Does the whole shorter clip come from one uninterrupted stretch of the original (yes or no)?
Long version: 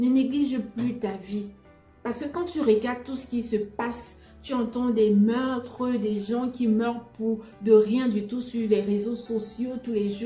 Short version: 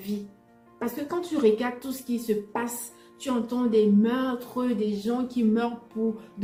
yes